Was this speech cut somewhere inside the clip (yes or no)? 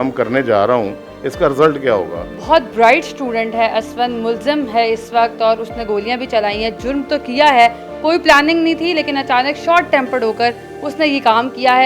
no